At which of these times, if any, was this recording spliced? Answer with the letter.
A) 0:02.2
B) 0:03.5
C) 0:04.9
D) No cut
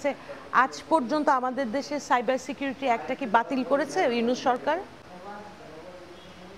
D